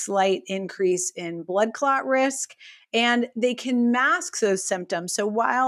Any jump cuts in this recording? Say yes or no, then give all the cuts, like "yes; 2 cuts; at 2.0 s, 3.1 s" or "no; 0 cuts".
no; 0 cuts